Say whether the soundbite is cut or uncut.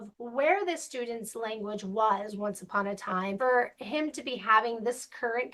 cut